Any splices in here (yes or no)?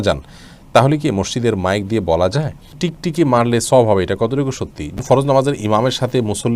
yes